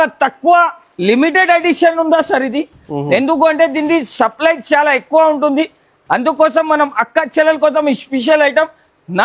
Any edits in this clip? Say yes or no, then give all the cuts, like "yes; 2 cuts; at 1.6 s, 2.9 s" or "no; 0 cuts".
no; 0 cuts